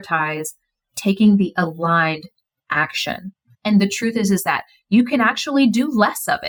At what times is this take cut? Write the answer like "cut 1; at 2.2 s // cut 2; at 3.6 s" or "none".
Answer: none